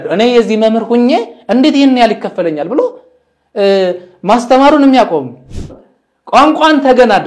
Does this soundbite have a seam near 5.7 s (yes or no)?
yes